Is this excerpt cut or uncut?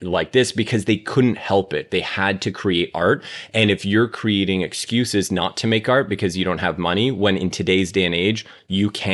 uncut